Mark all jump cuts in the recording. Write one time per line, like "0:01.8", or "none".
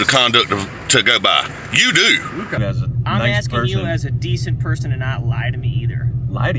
0:02.6